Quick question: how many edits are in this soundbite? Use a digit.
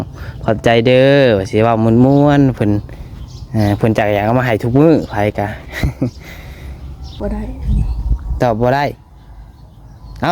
1